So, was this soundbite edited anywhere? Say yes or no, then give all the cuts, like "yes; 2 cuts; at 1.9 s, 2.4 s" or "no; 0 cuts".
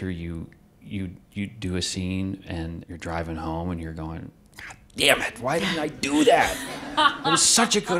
yes; 1 cut; at 2.9 s